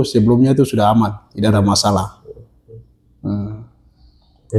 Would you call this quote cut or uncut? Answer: uncut